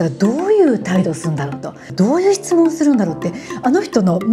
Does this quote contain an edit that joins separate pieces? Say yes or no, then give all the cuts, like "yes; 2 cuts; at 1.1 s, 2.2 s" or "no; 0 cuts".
yes; 1 cut; at 1.9 s